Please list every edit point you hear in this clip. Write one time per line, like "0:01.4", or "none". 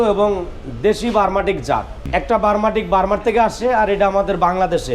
0:02.0